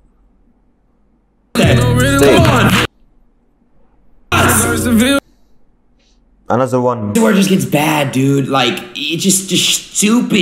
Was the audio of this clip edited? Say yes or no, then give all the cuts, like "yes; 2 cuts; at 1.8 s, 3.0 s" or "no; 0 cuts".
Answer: yes; 1 cut; at 7.1 s